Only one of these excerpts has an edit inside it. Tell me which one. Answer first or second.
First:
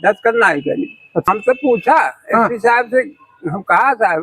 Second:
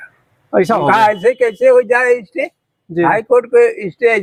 first